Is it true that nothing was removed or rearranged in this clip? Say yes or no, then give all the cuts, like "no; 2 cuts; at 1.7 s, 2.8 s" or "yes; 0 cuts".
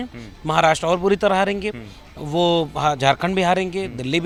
yes; 0 cuts